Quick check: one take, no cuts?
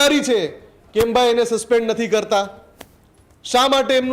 yes; 0 cuts

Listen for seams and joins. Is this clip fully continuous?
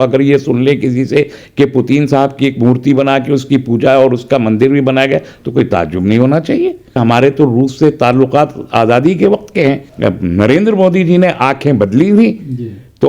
no; 2 cuts; at 7.0 s, 9.9 s

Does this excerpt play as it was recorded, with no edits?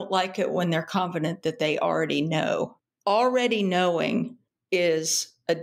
no; 1 cut; at 2.8 s

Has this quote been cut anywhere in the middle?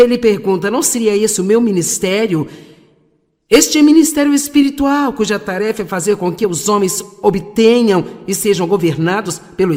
no; 0 cuts

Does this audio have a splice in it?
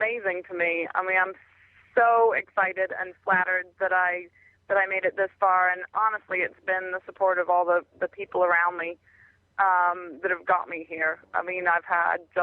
no; 0 cuts

